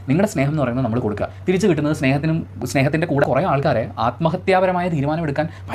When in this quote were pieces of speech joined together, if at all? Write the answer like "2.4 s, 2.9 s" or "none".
3.2 s

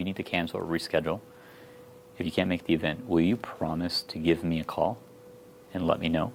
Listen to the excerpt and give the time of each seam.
none

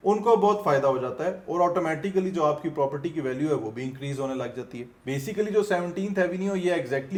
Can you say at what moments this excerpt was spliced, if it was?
none

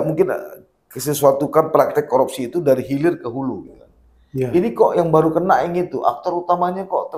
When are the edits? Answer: none

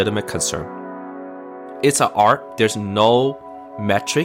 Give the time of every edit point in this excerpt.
1.2 s

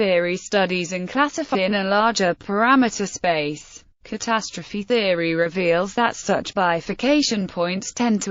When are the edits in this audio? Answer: none

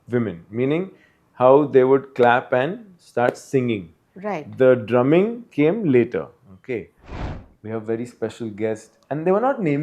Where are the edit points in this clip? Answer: 7.1 s

